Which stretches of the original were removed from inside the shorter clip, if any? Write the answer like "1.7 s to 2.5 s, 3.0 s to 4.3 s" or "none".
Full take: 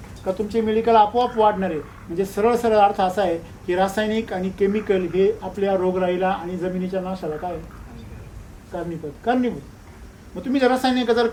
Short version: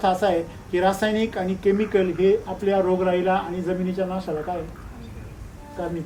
none